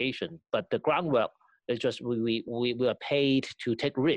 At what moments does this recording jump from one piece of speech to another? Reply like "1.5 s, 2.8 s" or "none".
2.5 s